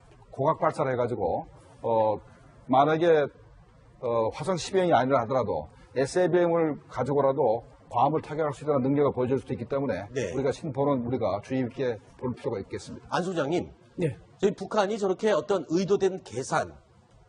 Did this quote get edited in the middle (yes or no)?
no